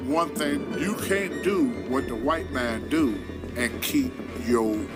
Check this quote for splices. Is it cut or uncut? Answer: uncut